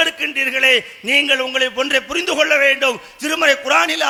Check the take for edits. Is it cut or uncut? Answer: uncut